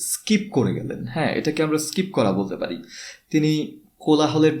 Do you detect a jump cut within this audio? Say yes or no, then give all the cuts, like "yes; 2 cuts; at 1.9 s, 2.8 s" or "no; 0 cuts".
no; 0 cuts